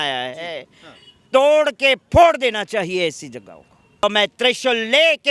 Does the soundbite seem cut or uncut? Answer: cut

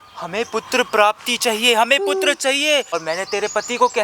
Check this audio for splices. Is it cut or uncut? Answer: cut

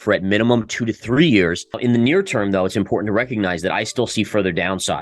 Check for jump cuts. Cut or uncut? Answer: cut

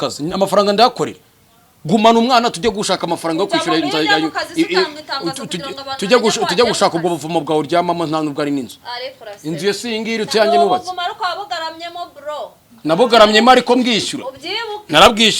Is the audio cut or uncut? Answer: uncut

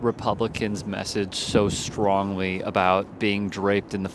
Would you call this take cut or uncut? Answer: uncut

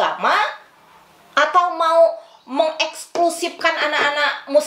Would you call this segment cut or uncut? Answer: uncut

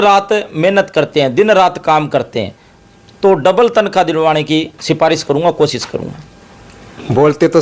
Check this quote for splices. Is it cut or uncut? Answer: uncut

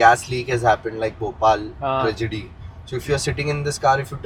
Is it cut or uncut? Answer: uncut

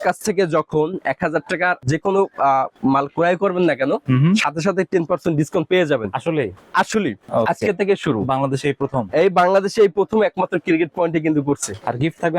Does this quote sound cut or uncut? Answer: cut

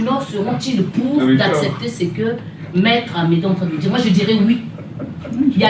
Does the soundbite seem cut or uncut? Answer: uncut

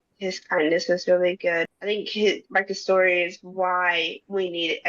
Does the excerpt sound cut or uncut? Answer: cut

